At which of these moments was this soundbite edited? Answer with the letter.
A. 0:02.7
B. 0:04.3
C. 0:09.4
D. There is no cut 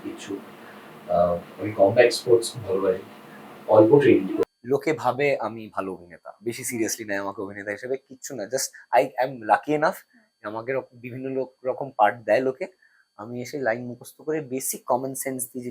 B